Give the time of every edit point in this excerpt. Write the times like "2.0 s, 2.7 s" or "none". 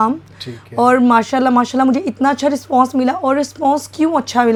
none